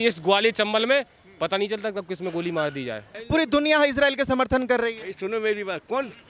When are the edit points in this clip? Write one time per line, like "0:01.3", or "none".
0:03.2